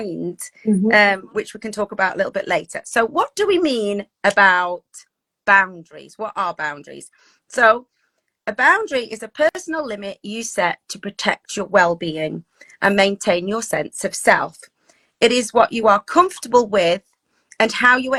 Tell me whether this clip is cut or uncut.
uncut